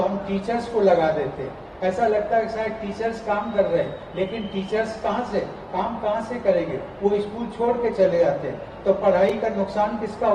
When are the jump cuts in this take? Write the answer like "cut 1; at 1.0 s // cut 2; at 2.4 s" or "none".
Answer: none